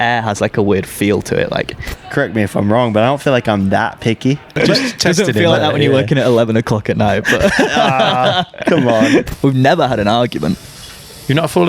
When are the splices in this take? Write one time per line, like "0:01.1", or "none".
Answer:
0:02.0
0:04.6
0:09.3